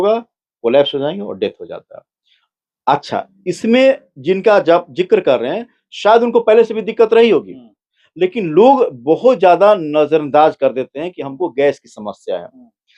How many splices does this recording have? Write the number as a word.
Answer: zero